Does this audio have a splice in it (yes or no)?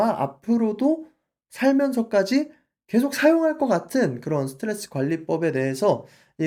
no